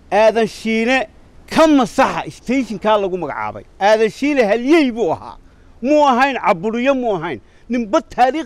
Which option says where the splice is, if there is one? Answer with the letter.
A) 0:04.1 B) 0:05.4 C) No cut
C